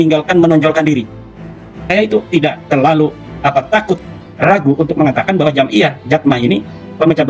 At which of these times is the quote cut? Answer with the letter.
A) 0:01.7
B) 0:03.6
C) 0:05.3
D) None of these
A